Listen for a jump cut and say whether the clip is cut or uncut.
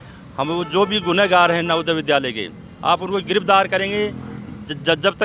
uncut